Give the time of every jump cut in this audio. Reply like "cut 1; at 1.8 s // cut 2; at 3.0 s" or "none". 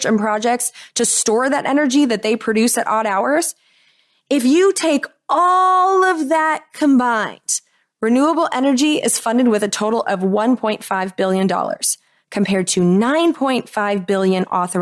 none